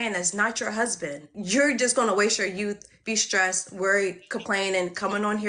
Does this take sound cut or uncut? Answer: cut